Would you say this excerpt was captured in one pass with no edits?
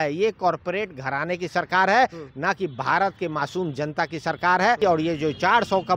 no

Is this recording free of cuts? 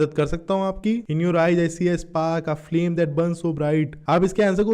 no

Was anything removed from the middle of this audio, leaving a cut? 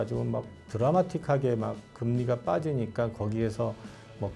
no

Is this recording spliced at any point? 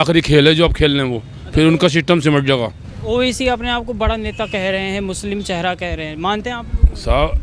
no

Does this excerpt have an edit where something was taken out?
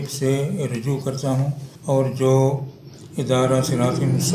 yes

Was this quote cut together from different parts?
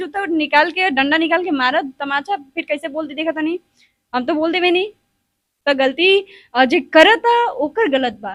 no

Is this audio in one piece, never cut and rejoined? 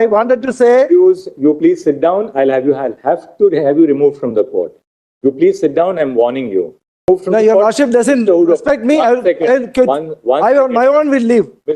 no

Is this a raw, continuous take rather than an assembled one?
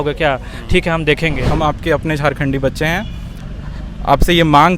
no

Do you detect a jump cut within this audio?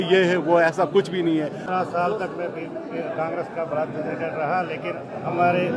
yes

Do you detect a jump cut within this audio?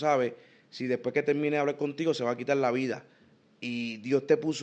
no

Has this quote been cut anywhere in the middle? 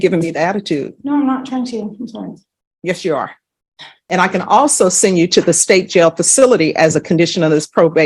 yes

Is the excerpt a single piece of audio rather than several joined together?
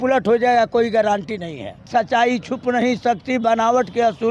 no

